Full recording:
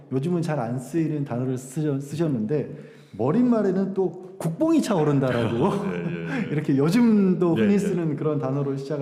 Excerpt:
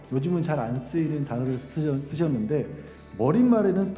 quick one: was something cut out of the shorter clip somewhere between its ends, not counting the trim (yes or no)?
no